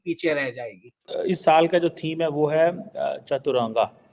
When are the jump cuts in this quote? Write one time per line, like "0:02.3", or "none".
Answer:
0:01.1